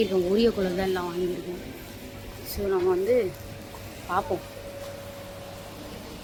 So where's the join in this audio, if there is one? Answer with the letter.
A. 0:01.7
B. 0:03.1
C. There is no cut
C